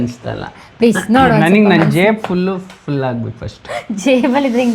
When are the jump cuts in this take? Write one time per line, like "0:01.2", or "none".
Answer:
none